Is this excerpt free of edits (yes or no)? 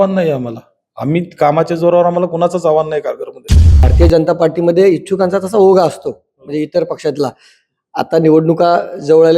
no